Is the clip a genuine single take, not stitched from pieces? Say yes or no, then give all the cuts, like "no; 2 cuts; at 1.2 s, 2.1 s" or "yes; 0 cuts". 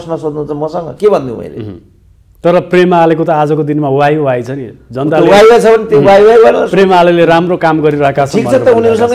yes; 0 cuts